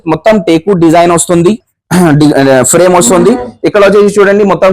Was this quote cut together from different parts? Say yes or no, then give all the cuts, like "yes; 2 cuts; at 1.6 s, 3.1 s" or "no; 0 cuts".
no; 0 cuts